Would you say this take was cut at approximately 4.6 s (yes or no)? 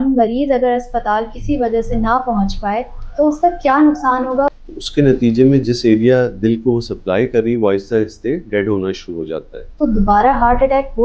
yes